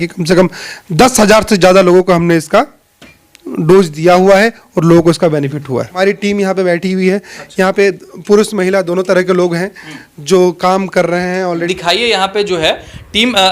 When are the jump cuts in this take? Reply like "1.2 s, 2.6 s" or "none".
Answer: 5.9 s, 11.6 s